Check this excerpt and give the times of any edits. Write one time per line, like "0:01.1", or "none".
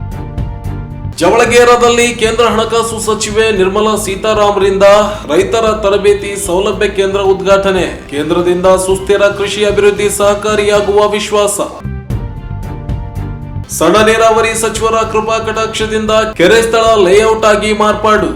0:01.1